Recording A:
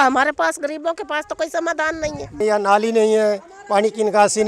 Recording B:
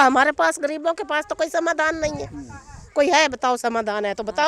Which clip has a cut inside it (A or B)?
A